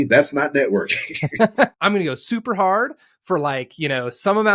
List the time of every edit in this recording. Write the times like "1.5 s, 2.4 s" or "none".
1.7 s